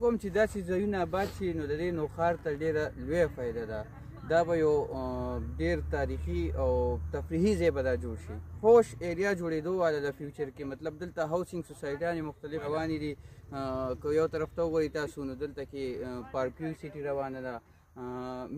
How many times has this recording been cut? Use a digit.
2